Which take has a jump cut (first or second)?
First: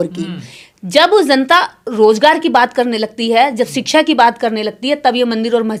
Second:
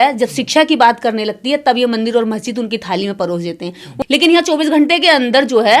second